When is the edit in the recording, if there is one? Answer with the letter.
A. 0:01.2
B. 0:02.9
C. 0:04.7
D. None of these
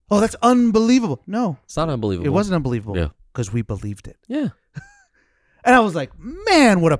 D